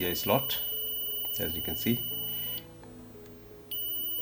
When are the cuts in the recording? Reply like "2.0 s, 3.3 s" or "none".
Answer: none

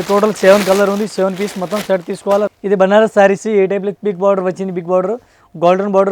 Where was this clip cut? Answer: 2.5 s

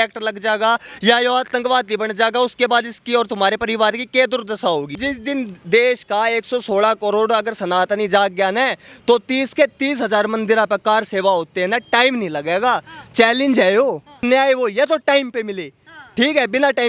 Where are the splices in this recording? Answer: 5.0 s, 14.2 s

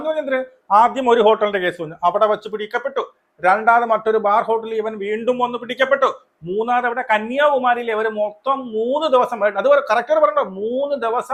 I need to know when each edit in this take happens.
none

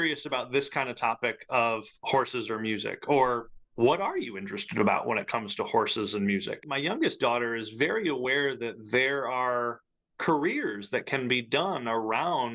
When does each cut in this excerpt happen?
6.7 s

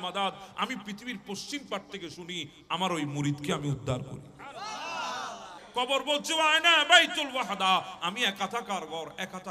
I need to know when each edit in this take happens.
5.6 s

